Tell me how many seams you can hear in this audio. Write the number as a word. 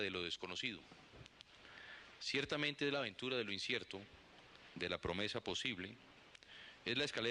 one